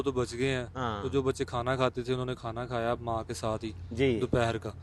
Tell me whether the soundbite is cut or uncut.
uncut